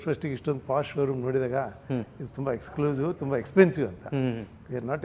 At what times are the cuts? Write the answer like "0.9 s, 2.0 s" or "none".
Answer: none